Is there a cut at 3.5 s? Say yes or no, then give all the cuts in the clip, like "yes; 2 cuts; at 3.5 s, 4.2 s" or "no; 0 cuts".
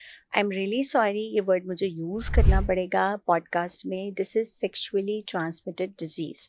no; 0 cuts